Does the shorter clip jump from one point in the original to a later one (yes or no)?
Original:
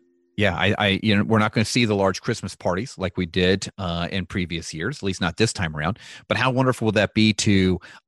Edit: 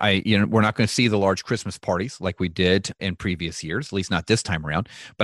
yes